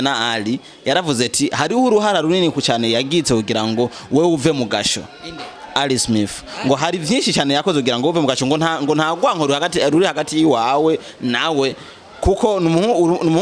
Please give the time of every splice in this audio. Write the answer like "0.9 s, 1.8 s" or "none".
none